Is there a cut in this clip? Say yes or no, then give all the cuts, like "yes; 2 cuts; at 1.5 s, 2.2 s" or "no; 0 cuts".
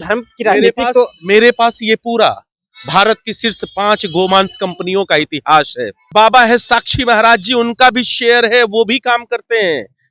yes; 1 cut; at 6.1 s